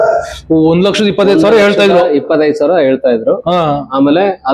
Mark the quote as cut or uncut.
uncut